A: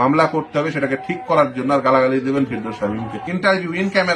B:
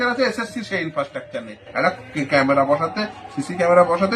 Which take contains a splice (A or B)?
A